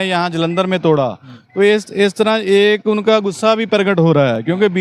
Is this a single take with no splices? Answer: yes; 0 cuts

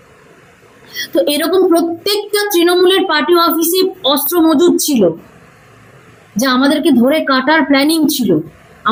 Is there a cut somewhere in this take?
no; 0 cuts

